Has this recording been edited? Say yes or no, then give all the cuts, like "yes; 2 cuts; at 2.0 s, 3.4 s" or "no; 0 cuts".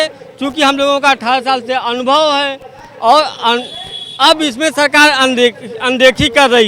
no; 0 cuts